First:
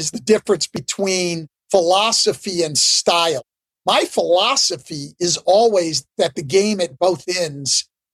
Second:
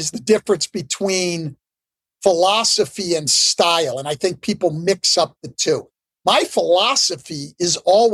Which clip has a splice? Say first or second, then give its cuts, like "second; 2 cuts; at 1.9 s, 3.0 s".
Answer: first; 2 cuts; at 1.0 s, 3.5 s